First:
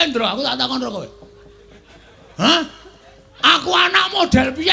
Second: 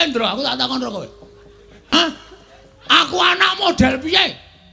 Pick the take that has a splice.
second; 1 cut; at 1.9 s

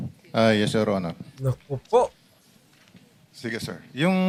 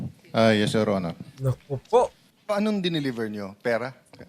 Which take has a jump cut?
second; 1 cut; at 2.3 s

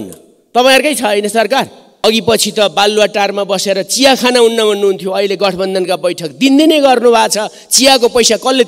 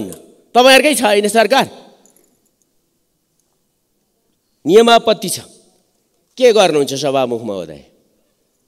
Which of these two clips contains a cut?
first; 1 cut; at 2.0 s

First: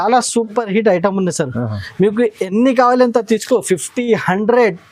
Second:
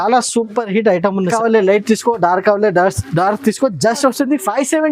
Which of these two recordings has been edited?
second; 1 cut; at 1.3 s

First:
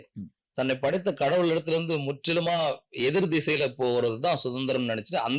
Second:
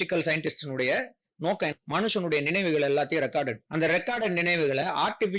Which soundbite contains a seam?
second; 2 cuts; at 1.7 s, 3.6 s

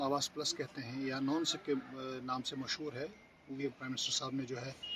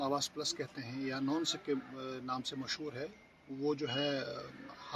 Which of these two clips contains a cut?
first; 1 cut; at 3.6 s

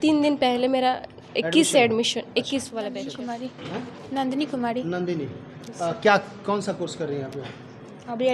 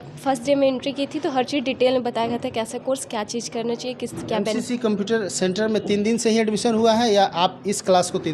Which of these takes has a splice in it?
first; 1 cut; at 3.2 s

